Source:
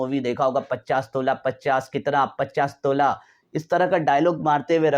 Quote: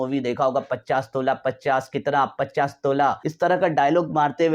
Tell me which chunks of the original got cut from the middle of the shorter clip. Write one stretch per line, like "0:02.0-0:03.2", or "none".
0:03.3-0:03.6